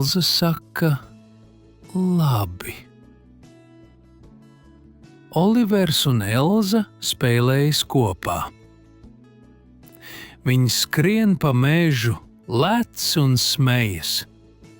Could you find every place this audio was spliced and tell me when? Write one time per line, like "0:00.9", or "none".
0:02.8
0:04.5
0:05.3
0:08.6
0:10.2